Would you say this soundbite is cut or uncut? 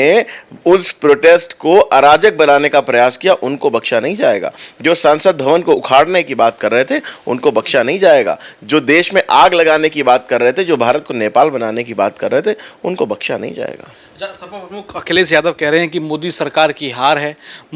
uncut